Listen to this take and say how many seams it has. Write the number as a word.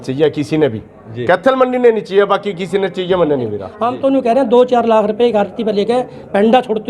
one